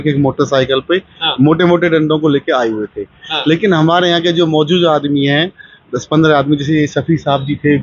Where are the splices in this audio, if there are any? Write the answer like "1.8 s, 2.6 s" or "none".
none